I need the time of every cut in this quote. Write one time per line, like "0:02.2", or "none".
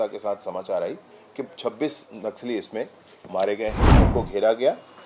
0:04.0